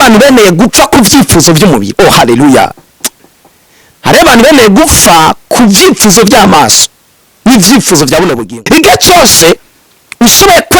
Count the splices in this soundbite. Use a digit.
1